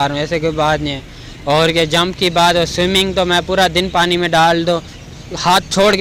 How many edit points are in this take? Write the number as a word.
zero